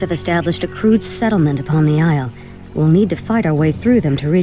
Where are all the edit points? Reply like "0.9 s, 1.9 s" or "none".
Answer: none